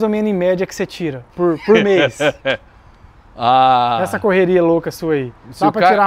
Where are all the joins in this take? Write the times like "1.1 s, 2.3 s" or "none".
none